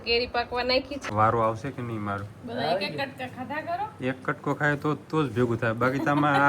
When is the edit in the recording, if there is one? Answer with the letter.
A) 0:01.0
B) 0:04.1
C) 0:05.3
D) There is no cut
A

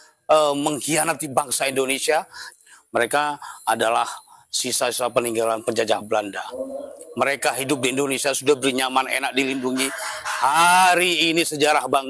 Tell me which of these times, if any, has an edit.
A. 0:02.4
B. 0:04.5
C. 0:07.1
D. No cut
A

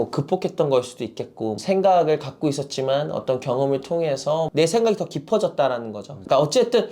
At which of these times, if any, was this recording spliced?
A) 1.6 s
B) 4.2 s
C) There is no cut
A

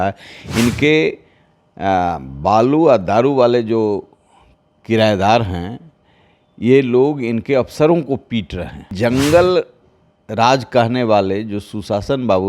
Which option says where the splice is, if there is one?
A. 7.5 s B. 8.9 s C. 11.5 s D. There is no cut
B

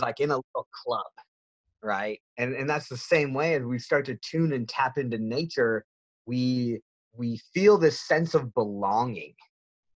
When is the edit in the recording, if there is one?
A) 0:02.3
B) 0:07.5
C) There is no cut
A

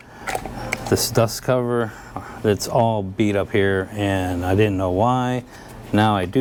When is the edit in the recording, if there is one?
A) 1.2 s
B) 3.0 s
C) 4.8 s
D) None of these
D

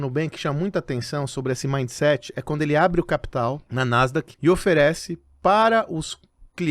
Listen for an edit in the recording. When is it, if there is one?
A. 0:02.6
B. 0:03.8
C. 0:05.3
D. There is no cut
B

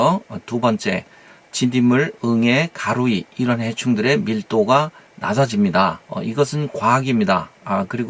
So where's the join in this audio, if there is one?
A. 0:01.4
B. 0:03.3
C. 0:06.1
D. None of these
C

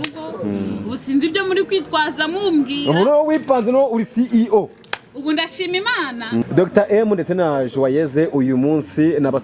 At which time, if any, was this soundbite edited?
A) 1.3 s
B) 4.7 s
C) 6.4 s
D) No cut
C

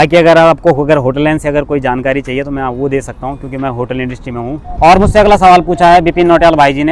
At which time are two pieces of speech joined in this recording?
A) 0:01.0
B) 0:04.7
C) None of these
B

